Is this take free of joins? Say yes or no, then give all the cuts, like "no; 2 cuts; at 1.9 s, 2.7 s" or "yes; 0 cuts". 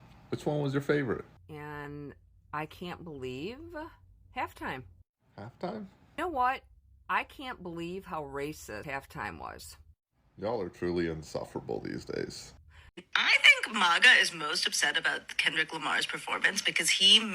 no; 2 cuts; at 8.8 s, 13.1 s